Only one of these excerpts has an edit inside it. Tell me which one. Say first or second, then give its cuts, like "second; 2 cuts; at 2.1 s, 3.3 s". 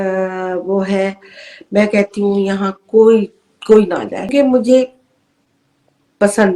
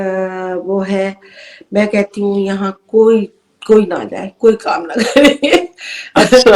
first; 1 cut; at 4.3 s